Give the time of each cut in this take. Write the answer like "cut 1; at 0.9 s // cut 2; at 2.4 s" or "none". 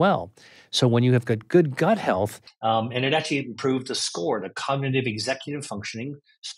cut 1; at 2.5 s